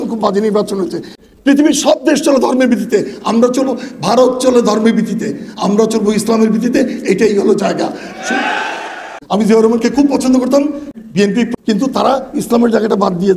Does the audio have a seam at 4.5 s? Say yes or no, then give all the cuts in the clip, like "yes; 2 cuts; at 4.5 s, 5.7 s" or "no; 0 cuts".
no; 3 cuts; at 1.1 s, 9.2 s, 11.0 s